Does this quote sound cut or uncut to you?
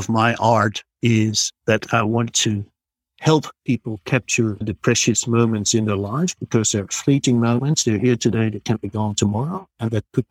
uncut